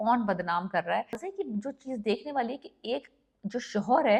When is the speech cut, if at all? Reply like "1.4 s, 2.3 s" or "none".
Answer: 1.3 s